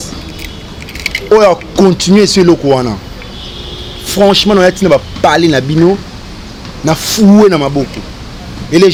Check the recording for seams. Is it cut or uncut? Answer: uncut